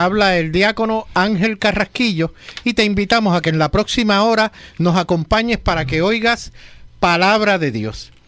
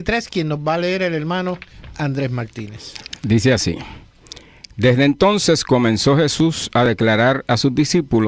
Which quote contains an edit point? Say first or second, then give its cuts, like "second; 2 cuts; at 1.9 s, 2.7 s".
second; 1 cut; at 1.4 s